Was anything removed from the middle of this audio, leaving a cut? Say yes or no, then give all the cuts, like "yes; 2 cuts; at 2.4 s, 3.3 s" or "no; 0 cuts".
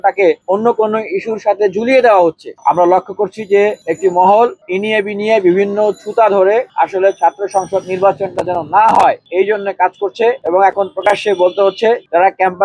no; 0 cuts